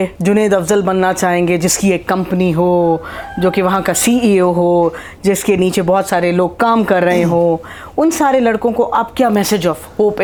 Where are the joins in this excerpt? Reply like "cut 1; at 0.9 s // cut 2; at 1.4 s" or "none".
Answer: none